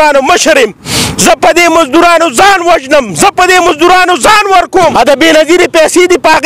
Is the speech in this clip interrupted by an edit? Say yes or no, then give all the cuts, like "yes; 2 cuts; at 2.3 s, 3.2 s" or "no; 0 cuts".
yes; 1 cut; at 4.9 s